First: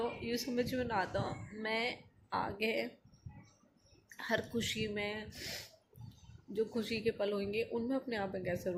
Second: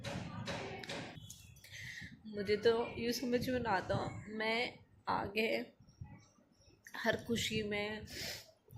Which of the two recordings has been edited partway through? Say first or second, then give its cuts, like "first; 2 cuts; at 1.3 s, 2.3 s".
second; 1 cut; at 1.2 s